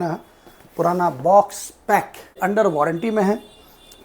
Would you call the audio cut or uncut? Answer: cut